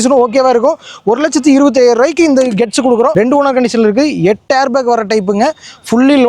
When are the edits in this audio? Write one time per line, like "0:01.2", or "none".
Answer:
0:03.1